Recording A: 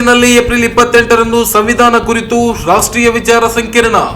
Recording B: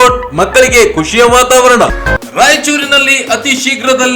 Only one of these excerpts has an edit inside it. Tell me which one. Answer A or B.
B